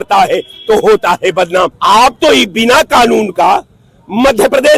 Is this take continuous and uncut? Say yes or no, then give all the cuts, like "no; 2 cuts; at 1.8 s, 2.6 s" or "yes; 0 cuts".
no; 1 cut; at 1.8 s